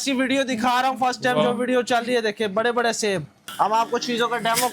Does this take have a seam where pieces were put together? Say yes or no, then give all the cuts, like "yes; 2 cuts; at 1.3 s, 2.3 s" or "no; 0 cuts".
yes; 1 cut; at 3.4 s